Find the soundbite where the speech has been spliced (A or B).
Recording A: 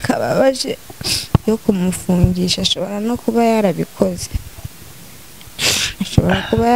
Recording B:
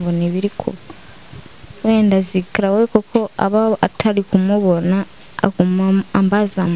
A